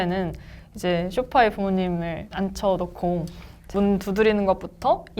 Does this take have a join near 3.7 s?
yes; 2 cuts; at 2.3 s, 3.7 s

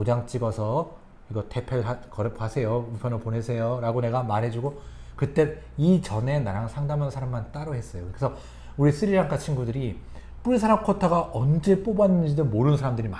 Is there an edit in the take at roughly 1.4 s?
no; 0 cuts

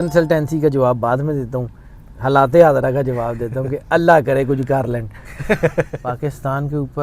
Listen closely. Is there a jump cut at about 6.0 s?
yes; 1 cut; at 6.0 s

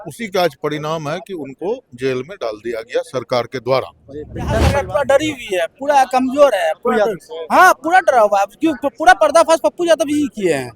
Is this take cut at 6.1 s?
no; 1 cut; at 4.6 s

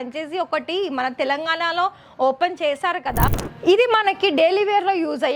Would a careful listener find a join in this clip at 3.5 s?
yes; 1 cut; at 3.5 s

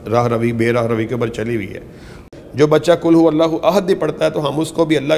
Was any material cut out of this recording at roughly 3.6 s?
no; 1 cut; at 2.3 s

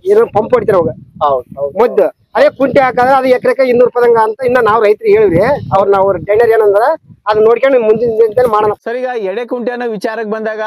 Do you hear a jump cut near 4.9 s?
no; 1 cut; at 8.6 s

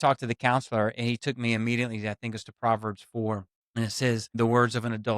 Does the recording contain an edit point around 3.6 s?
yes; 1 cut; at 3.6 s

